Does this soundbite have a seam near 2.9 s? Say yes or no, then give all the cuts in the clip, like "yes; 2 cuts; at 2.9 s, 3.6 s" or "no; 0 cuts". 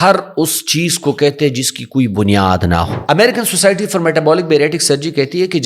yes; 1 cut; at 2.9 s